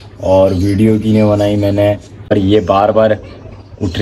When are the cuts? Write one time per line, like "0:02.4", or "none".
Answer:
0:02.3